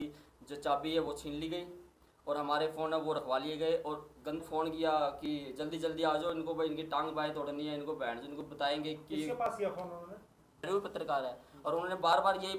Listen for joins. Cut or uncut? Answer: cut